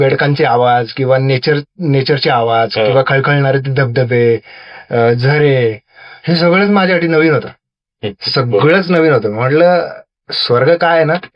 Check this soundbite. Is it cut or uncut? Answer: uncut